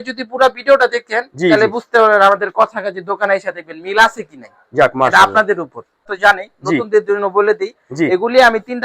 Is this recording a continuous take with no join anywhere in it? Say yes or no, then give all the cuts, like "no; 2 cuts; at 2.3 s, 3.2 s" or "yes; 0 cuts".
no; 1 cut; at 6.1 s